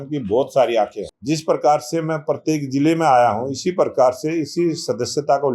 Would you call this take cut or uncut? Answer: cut